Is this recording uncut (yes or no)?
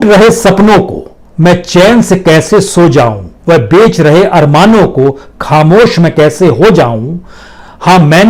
yes